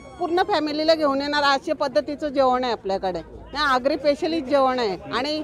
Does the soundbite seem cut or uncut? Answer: uncut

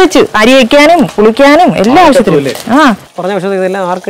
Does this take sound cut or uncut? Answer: cut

